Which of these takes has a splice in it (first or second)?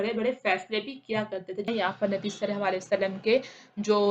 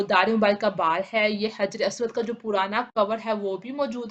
first